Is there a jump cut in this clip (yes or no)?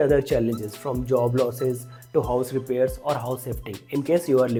no